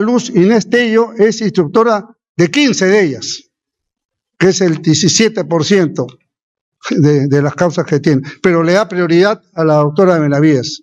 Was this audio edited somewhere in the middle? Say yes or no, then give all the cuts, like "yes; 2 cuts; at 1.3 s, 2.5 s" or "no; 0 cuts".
no; 0 cuts